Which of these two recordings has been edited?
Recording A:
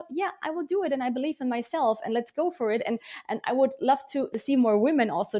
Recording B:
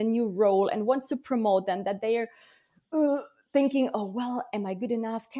A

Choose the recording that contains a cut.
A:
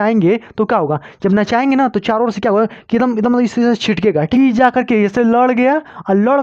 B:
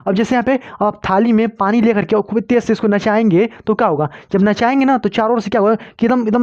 A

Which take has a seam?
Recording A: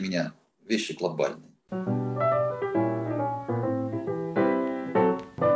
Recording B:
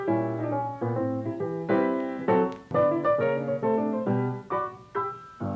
A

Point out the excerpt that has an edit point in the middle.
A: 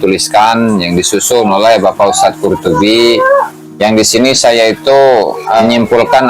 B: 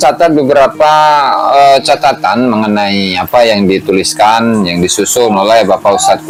A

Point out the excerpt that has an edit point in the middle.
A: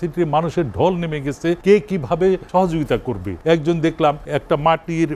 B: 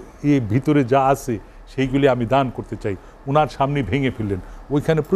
A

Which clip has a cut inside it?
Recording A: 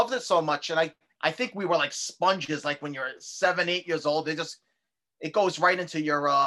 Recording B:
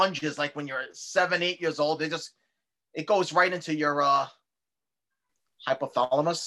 A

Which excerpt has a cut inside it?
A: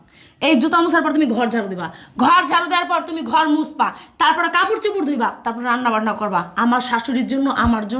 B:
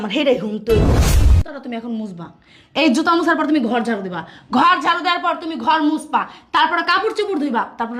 B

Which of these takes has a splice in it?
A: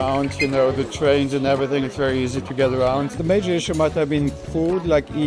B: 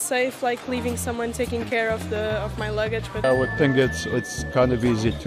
B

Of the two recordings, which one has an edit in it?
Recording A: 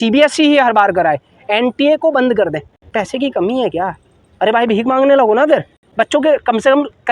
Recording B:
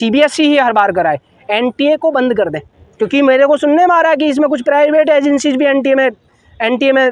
A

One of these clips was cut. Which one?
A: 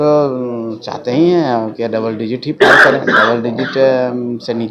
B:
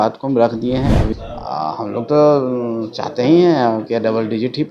B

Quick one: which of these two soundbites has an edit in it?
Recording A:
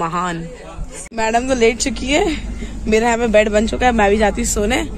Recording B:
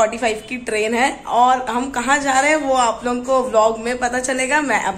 A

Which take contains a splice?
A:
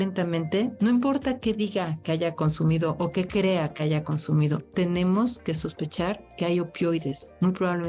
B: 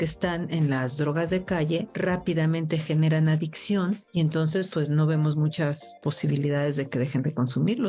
B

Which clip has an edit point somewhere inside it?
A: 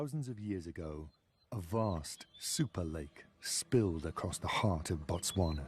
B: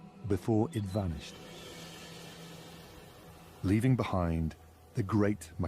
B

